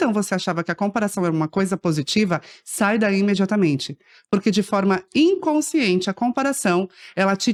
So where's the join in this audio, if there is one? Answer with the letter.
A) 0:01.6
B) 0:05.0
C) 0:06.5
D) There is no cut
D